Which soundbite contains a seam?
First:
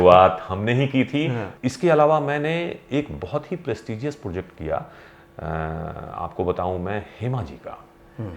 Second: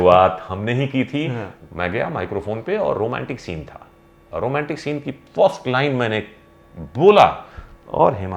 second; 1 cut; at 1.5 s

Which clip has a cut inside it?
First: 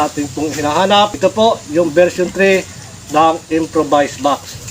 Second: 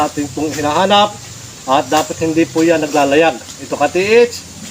first; 1 cut; at 1.1 s

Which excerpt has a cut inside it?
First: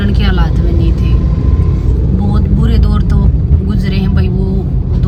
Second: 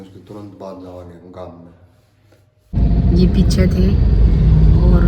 second; 1 cut; at 2.7 s

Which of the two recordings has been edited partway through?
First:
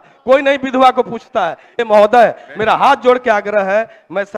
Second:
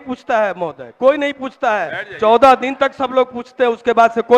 first; 1 cut; at 1.7 s

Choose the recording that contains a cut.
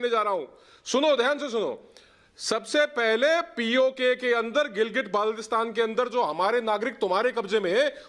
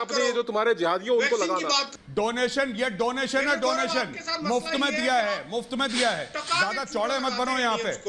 second; 1 cut; at 1.9 s

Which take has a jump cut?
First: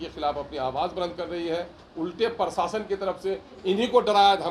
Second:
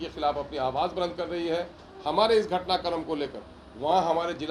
first; 1 cut; at 1.8 s

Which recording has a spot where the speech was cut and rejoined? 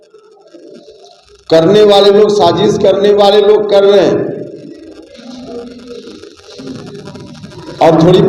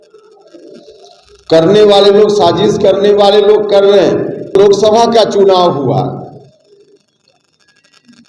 second; 1 cut; at 4.5 s

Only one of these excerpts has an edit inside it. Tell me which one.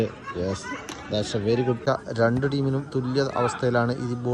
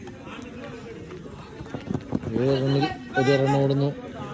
first; 1 cut; at 1.8 s

